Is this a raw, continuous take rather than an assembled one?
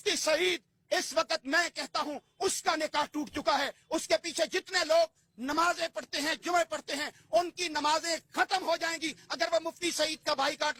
yes; 0 cuts

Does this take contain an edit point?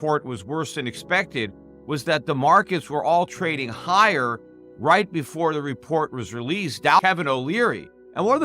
yes; 1 cut; at 7.0 s

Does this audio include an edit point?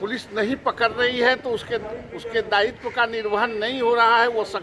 no; 0 cuts

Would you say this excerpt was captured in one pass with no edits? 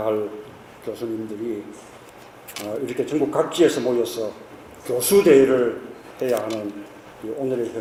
yes; 0 cuts

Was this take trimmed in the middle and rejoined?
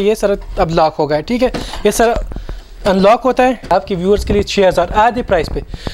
yes; 1 cut; at 3.7 s

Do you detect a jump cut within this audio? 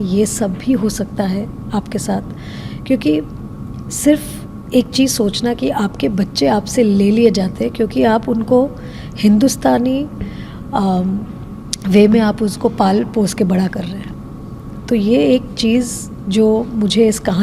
no; 0 cuts

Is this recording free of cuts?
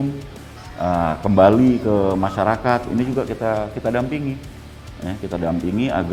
yes; 0 cuts

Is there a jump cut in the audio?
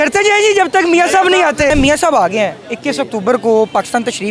yes; 1 cut; at 1.7 s

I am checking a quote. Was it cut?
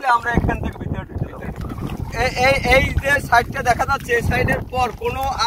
yes; 1 cut; at 1.6 s

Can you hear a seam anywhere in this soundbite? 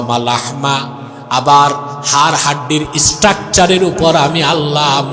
no; 0 cuts

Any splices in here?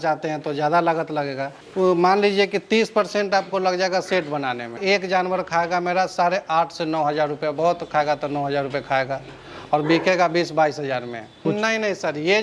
yes; 2 cuts; at 4.8 s, 11.4 s

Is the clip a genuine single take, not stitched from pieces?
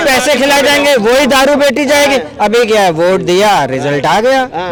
yes; 0 cuts

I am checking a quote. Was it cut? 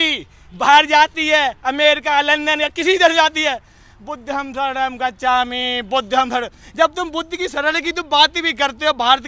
no; 0 cuts

